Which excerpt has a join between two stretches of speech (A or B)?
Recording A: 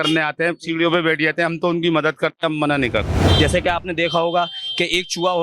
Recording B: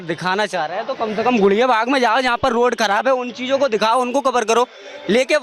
A